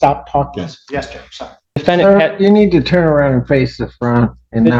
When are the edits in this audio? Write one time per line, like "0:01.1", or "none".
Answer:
0:01.7